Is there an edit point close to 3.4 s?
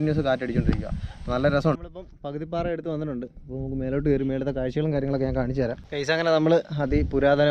no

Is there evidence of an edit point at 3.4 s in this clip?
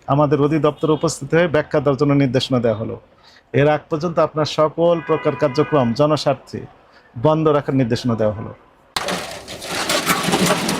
no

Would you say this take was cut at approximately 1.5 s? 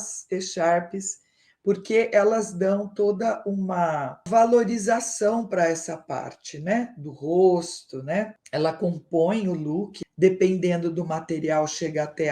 no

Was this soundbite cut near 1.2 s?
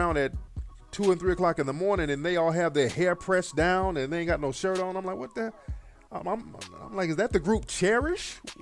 yes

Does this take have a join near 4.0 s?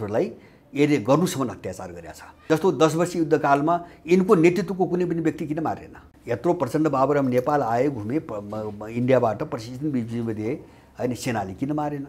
no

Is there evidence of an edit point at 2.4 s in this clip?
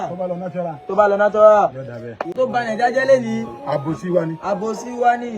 yes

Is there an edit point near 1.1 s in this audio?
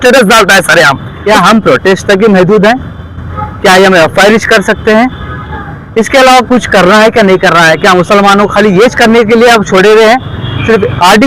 yes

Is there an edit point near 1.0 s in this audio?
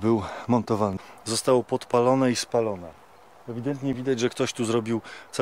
yes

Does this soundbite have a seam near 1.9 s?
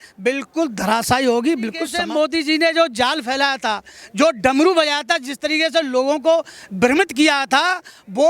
yes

